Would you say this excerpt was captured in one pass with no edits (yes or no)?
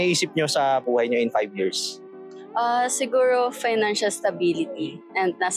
yes